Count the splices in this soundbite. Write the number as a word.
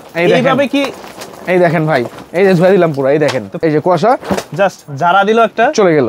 one